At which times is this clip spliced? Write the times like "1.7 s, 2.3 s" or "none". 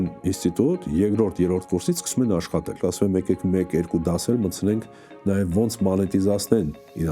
2.8 s